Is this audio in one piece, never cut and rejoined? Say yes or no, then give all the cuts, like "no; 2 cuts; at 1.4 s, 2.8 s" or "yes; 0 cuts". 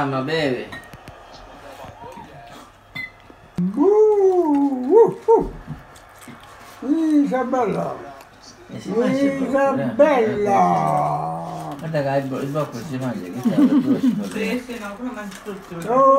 no; 1 cut; at 3.6 s